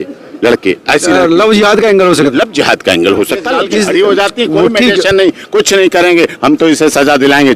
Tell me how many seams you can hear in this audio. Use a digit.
1